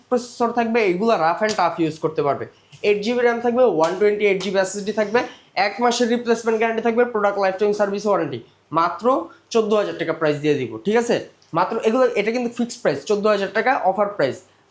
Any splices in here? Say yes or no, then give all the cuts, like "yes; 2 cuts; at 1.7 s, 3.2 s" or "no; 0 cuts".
no; 0 cuts